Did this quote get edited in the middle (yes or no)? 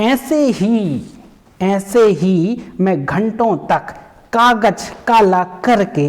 no